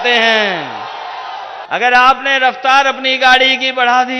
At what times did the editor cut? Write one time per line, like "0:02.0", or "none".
0:01.6